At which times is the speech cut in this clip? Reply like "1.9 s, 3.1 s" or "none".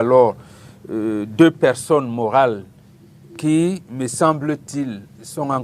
none